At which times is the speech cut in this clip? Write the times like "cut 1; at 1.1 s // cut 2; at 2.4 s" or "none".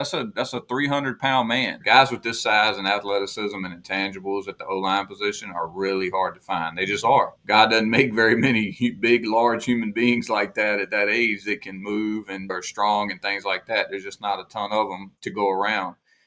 cut 1; at 1.8 s // cut 2; at 7.4 s // cut 3; at 12.5 s // cut 4; at 15.1 s